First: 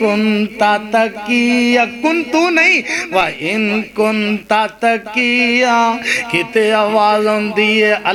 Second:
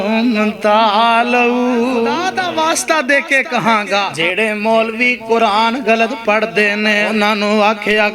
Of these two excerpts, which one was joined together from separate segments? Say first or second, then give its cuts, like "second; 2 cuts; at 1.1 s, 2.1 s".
second; 3 cuts; at 2.3 s, 4.2 s, 7.1 s